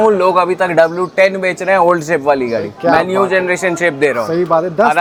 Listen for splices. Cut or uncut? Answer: uncut